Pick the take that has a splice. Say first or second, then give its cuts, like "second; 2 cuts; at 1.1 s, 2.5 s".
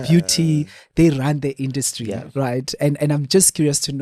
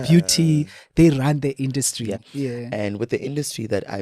second; 1 cut; at 2.3 s